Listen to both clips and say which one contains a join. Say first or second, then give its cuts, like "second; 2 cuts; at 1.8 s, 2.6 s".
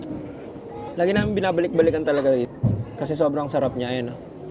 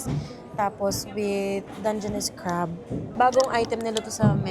second; 1 cut; at 3.1 s